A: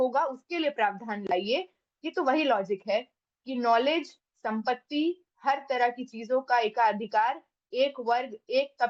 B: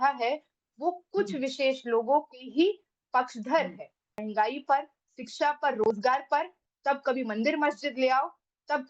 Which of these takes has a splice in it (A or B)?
B